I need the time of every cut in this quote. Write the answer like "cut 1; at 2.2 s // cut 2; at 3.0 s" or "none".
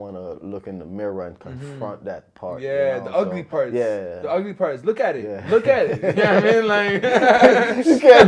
none